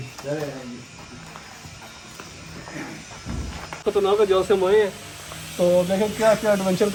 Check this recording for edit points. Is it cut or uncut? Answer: uncut